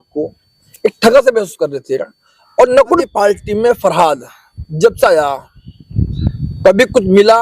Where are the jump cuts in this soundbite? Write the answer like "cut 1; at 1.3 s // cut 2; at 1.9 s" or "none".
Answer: cut 1; at 3.0 s